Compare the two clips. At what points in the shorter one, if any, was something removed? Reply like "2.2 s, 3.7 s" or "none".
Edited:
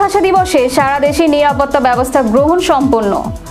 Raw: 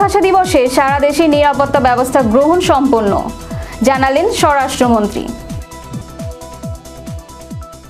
none